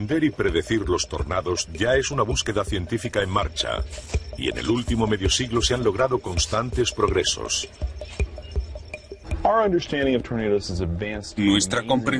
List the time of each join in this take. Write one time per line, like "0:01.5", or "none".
0:08.1